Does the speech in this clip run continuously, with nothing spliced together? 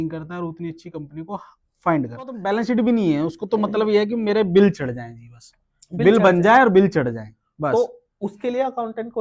no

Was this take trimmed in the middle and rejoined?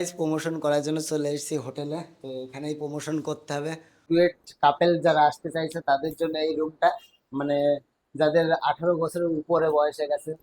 yes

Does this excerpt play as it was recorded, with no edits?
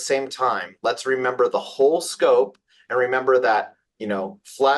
yes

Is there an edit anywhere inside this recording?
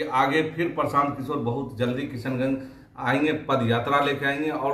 no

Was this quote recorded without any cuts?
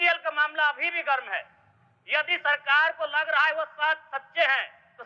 yes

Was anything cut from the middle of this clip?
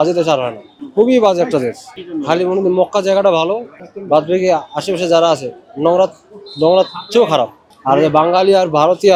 no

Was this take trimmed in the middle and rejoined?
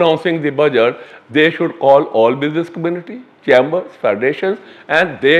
no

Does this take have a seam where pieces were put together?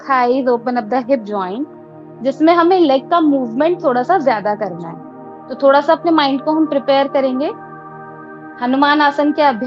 no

